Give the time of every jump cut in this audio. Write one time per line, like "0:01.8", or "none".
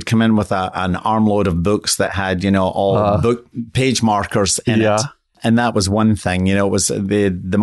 0:03.5